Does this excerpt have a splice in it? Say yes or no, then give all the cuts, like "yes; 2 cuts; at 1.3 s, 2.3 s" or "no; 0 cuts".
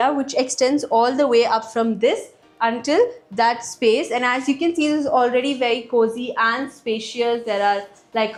no; 0 cuts